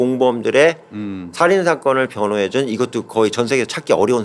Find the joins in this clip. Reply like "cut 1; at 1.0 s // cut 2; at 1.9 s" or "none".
none